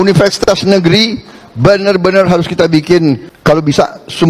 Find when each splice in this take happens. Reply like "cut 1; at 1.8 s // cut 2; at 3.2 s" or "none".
cut 1; at 3.3 s